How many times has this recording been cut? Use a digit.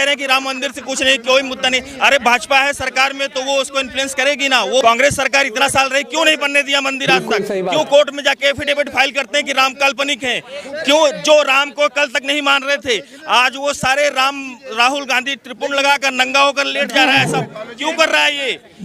1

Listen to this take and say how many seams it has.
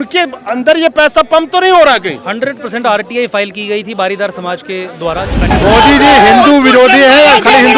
1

